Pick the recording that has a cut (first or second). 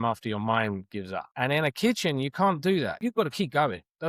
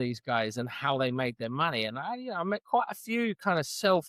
first